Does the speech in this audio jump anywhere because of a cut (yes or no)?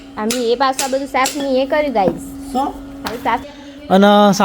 yes